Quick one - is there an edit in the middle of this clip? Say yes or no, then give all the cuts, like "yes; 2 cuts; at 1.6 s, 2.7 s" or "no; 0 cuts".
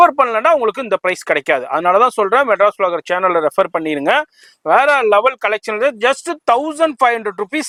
no; 0 cuts